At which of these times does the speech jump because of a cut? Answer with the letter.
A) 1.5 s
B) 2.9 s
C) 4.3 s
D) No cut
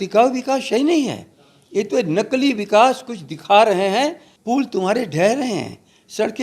C